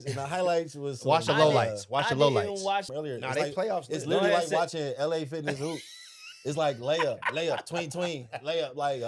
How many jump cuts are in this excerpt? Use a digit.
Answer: 1